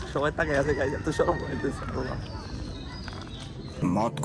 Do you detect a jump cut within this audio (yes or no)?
no